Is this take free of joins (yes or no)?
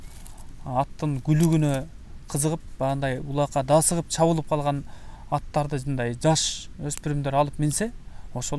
yes